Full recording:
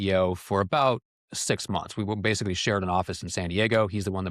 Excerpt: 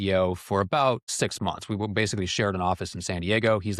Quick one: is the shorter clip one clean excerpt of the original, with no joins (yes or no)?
no